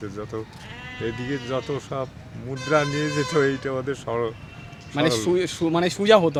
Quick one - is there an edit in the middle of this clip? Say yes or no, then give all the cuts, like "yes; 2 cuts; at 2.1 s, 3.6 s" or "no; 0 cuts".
no; 0 cuts